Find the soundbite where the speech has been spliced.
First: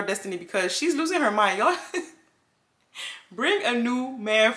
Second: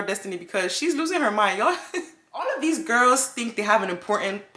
second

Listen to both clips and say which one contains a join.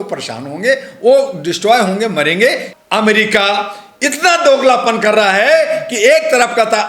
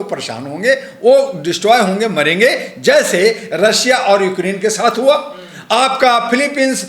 first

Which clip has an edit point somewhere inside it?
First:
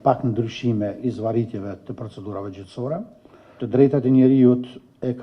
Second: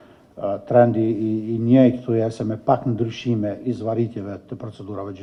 first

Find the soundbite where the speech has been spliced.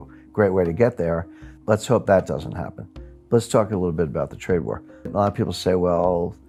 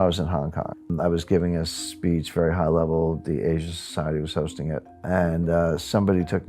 second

